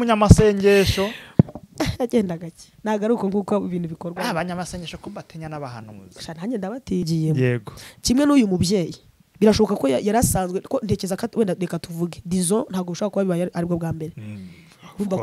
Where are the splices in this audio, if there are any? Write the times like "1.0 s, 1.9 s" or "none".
7.1 s